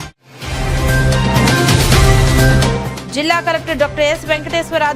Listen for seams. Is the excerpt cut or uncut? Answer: cut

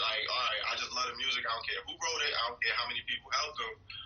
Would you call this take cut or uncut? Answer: uncut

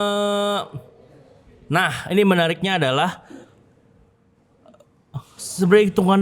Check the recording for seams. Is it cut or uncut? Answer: uncut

